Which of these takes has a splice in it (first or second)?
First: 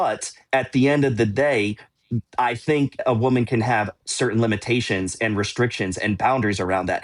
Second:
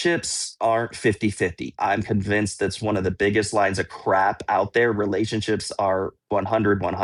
first